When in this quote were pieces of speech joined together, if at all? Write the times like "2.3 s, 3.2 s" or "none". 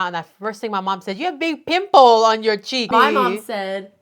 2.8 s